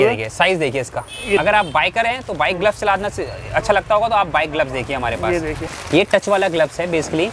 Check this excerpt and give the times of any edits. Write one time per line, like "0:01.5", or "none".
0:01.4
0:05.7